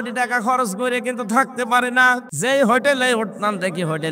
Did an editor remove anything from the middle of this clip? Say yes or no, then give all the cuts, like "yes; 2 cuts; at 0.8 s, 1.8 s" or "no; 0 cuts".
yes; 1 cut; at 2.3 s